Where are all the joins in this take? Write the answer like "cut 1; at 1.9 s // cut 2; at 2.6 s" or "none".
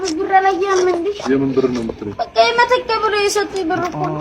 none

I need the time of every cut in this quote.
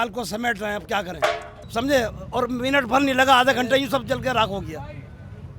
cut 1; at 1.5 s

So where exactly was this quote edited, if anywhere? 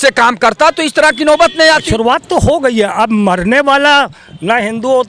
cut 1; at 1.9 s

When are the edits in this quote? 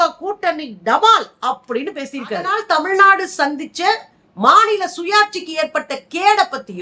cut 1; at 2.6 s

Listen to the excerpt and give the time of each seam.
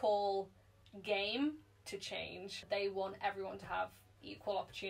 cut 1; at 2.6 s

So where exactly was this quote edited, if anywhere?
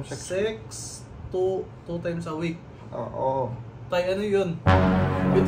none

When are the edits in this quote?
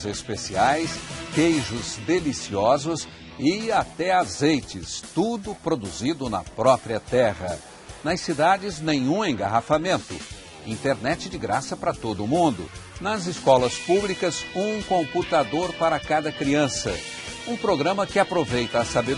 cut 1; at 11.8 s

